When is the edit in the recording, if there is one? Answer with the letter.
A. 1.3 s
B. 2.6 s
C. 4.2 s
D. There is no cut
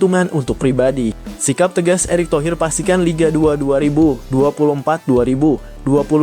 A